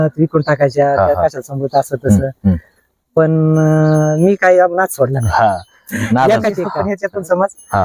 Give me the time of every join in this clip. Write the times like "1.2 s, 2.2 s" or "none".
6.7 s